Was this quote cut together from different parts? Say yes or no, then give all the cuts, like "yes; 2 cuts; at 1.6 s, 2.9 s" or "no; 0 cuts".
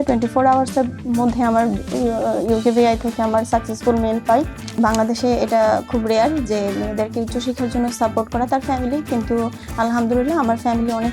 yes; 1 cut; at 4.8 s